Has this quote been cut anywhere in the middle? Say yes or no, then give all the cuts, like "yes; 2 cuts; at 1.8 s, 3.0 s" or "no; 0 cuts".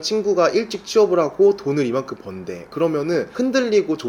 no; 0 cuts